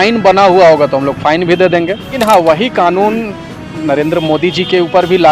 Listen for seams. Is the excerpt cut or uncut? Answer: cut